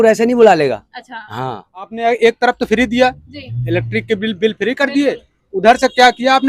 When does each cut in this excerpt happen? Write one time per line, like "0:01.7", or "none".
0:01.9